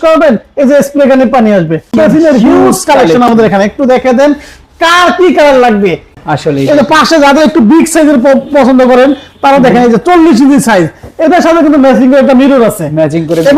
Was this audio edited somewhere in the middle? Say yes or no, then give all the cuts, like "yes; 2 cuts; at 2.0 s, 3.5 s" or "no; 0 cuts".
yes; 2 cuts; at 1.9 s, 6.1 s